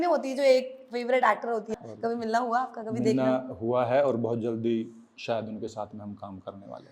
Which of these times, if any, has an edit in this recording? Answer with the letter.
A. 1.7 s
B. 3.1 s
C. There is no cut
A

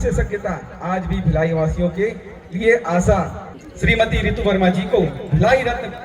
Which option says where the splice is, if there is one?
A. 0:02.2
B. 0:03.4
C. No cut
B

